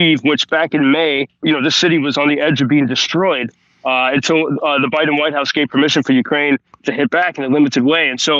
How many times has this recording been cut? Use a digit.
1